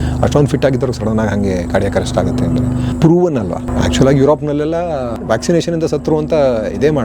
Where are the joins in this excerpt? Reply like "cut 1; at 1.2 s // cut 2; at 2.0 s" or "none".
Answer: cut 1; at 2.9 s // cut 2; at 3.7 s // cut 3; at 5.2 s